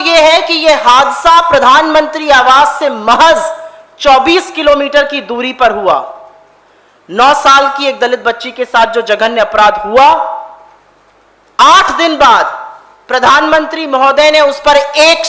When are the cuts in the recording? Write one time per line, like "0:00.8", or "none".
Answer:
none